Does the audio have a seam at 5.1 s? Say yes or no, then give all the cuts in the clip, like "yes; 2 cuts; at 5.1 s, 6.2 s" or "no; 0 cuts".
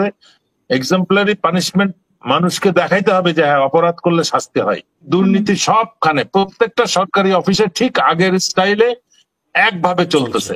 yes; 1 cut; at 5.1 s